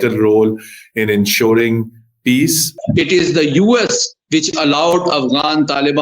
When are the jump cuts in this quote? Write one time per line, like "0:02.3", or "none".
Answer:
0:02.7